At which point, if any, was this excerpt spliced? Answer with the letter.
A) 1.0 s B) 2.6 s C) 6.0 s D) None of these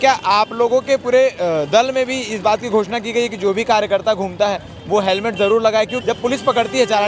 C